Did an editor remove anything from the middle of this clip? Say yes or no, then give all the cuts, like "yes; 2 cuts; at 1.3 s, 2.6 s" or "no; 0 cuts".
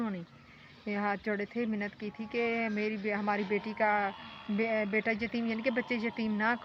no; 0 cuts